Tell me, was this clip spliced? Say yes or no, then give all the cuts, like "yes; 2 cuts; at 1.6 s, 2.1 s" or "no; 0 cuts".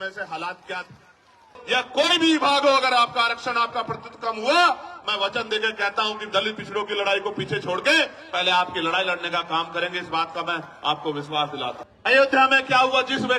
yes; 2 cuts; at 1.6 s, 11.9 s